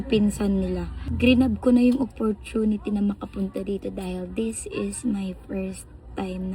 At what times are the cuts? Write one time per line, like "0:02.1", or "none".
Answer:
0:01.0